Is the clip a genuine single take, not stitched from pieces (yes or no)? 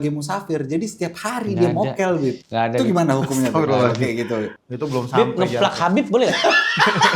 no